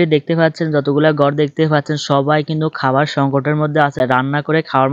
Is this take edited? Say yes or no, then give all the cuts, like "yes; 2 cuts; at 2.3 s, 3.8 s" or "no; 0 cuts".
yes; 1 cut; at 4.0 s